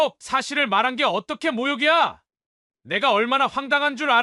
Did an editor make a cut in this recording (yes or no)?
no